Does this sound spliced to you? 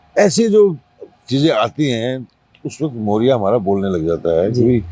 no; 0 cuts

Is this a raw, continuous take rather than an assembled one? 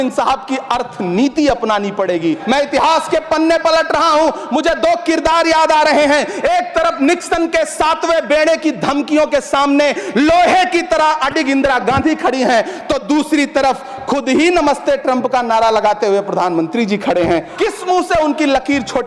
no; 2 cuts; at 2.4 s, 17.5 s

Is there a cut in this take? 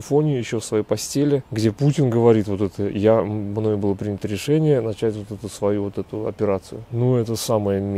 yes; 2 cuts; at 1.5 s, 6.8 s

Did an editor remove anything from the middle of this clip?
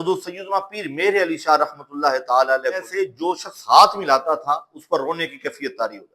yes; 1 cut; at 2.9 s

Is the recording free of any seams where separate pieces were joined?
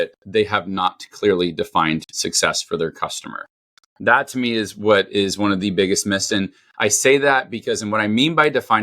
yes; 0 cuts

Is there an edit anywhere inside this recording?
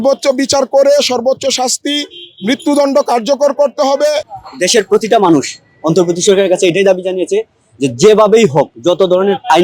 yes; 1 cut; at 4.3 s

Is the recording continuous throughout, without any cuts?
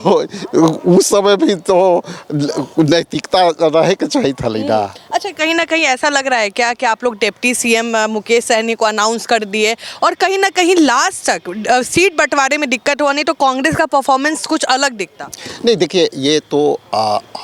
yes; 0 cuts

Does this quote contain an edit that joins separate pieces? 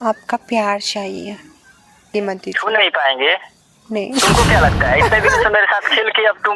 yes; 1 cut; at 2.1 s

